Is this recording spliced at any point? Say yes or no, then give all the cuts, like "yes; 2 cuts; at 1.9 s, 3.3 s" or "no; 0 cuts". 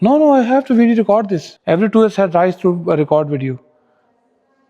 yes; 1 cut; at 1.4 s